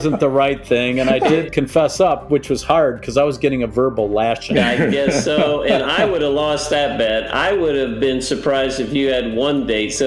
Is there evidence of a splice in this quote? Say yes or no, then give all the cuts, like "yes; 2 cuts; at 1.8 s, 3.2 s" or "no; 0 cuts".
yes; 2 cuts; at 1.5 s, 4.4 s